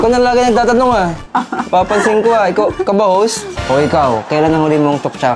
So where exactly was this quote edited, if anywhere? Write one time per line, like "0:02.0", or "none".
0:03.5